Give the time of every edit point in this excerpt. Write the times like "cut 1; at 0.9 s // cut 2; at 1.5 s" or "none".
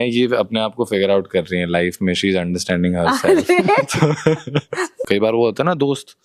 cut 1; at 5.0 s